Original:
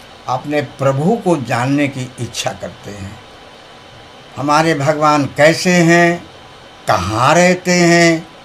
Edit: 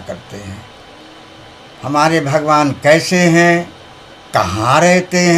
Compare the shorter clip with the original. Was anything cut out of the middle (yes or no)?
no